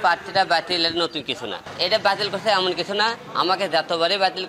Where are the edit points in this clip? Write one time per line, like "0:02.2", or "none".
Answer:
0:01.7
0:03.2

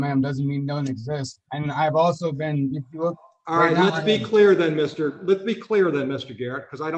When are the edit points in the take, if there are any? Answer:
none

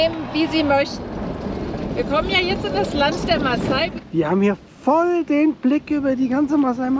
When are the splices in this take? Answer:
0:01.0
0:03.9

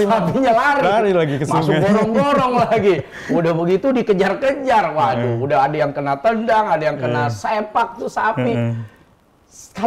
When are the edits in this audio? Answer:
none

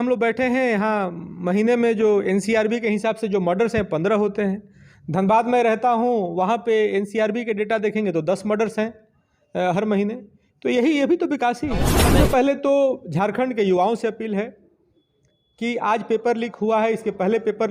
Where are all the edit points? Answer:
0:12.0

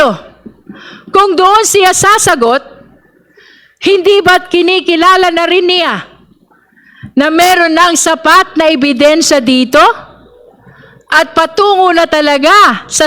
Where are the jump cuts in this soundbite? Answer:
none

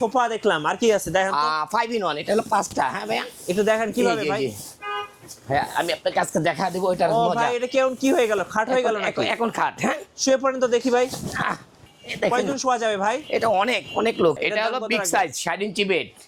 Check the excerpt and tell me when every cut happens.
0:14.4

